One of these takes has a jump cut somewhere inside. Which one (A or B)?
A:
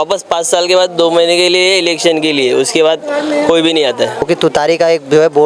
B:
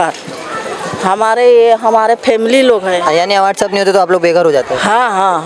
A